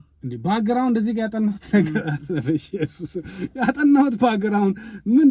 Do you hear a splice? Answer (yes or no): no